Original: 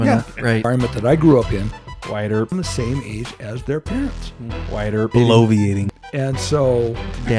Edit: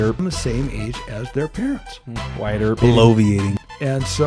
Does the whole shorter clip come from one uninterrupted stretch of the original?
yes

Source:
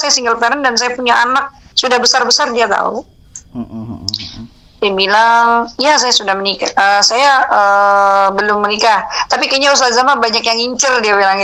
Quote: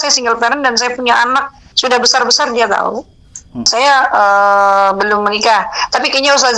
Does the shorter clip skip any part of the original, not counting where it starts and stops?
yes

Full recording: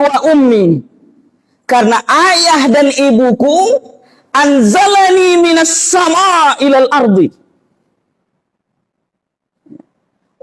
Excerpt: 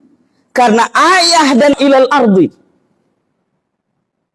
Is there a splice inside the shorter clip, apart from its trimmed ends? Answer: yes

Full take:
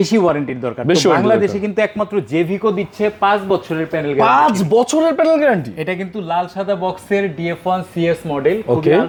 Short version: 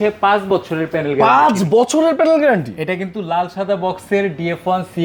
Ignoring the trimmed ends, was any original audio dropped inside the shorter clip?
no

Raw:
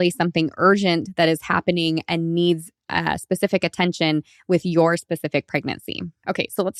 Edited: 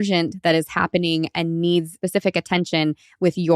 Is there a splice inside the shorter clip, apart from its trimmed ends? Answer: yes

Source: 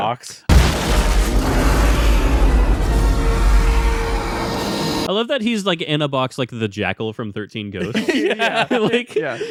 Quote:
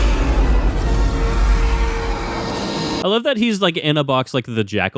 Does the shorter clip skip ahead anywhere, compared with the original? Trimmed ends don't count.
no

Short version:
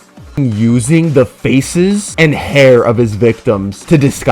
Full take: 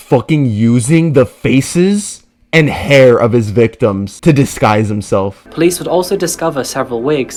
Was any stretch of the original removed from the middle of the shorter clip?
yes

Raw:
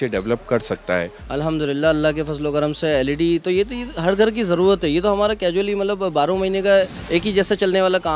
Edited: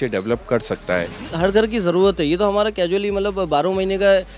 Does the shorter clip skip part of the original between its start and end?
yes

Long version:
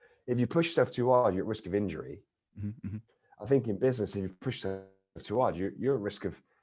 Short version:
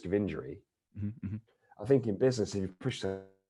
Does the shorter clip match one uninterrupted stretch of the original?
yes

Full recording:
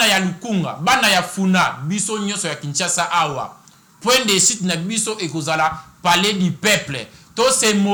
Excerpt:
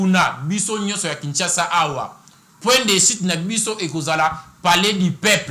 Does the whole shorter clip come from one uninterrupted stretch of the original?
yes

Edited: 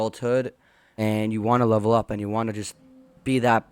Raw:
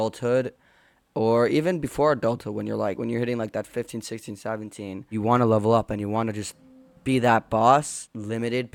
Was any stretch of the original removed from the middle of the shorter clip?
yes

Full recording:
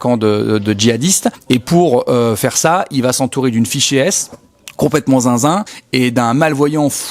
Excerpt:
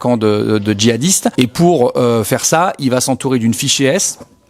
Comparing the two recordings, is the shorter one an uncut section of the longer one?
no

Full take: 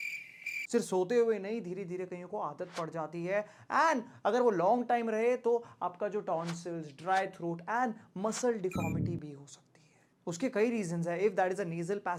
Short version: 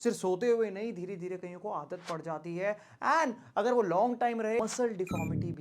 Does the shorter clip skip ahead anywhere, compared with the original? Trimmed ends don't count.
yes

